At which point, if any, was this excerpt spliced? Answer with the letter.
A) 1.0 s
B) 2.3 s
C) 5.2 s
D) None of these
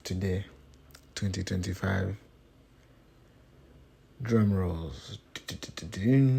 D